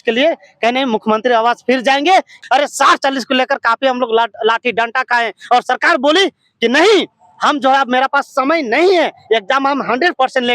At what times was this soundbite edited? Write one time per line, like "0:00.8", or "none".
0:02.4

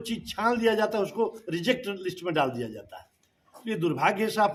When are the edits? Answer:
none

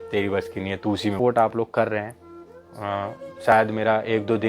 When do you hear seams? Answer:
0:01.2

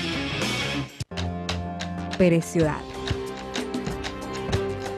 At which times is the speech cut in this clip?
0:01.0

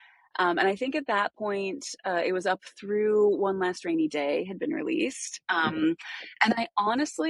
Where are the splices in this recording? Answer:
none

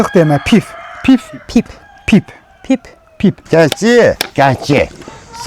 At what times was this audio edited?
0:03.4

